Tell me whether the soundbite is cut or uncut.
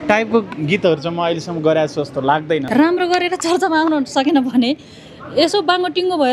cut